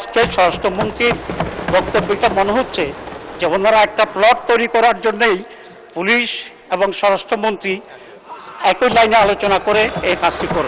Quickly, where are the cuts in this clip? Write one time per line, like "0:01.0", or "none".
none